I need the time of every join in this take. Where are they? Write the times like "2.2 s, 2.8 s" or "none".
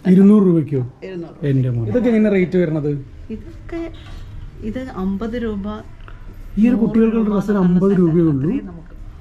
1.9 s

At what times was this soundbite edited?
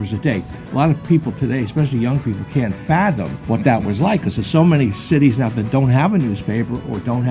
3.3 s

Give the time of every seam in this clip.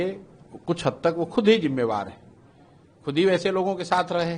none

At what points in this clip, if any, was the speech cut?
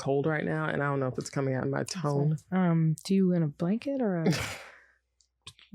2.4 s

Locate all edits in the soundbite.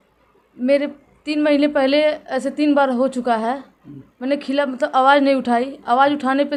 none

